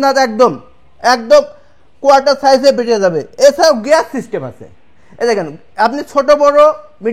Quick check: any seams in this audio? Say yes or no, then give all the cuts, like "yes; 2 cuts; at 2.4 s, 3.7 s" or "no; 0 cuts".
no; 0 cuts